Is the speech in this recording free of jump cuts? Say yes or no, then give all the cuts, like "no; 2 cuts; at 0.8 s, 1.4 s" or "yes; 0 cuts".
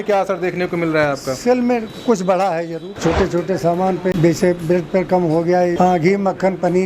no; 3 cuts; at 2.9 s, 4.1 s, 5.8 s